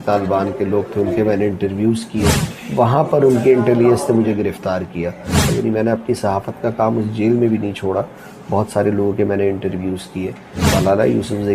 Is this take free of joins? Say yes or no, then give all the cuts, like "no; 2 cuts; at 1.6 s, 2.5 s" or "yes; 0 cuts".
no; 3 cuts; at 2.4 s, 5.5 s, 10.5 s